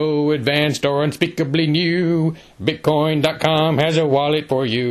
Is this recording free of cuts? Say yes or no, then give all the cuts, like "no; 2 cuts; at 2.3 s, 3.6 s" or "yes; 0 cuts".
yes; 0 cuts